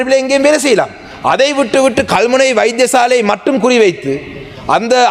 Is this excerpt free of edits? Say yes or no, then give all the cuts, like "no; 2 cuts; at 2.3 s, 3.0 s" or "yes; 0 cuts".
yes; 0 cuts